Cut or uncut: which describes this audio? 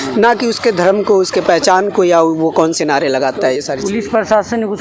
uncut